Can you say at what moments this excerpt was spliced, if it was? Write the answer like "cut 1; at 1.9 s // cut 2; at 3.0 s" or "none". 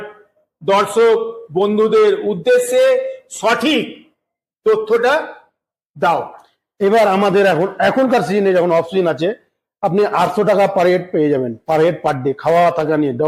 none

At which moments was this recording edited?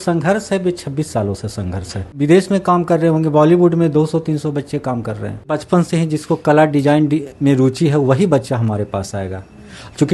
cut 1; at 2.1 s // cut 2; at 5.6 s

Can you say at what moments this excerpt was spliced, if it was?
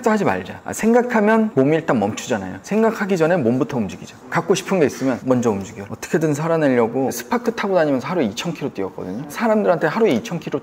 none

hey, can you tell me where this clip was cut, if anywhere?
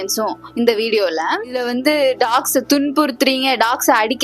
cut 1; at 1.6 s

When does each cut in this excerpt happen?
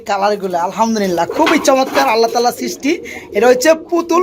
none

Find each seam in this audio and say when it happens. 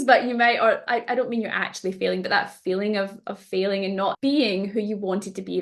cut 1; at 4.2 s

